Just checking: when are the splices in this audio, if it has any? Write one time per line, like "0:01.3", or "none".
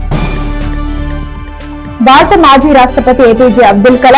0:01.2